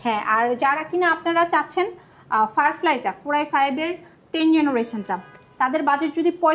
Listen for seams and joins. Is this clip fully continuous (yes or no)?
yes